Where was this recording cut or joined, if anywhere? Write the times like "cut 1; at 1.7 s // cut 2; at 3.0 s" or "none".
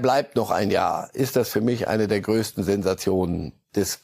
none